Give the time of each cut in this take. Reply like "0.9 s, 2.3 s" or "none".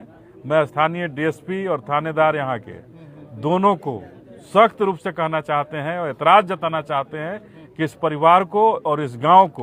none